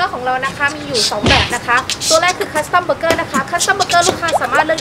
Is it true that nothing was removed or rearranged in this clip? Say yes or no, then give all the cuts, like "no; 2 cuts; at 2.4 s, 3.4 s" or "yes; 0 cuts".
yes; 0 cuts